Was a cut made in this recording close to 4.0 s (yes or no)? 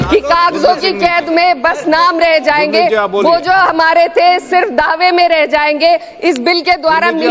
no